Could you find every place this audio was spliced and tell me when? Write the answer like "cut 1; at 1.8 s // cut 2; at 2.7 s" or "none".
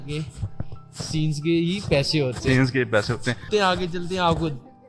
cut 1; at 3.4 s